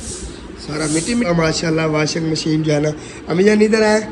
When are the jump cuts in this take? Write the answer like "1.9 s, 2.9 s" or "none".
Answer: 1.3 s